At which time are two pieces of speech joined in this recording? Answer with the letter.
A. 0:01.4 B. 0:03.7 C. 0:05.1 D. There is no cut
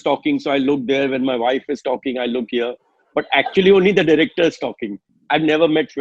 C